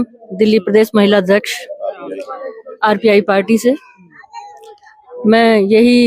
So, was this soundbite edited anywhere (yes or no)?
no